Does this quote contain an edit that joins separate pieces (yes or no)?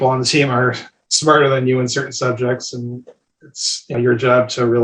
yes